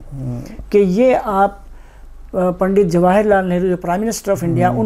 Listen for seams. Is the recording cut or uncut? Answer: uncut